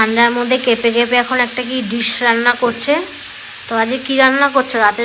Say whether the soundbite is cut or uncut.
uncut